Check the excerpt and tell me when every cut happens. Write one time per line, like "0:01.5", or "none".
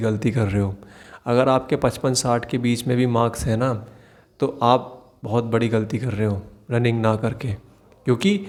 none